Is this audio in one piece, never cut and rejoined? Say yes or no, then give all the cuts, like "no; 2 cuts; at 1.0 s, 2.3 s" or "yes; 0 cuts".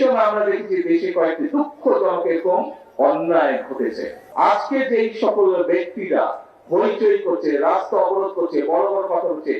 no; 1 cut; at 4.2 s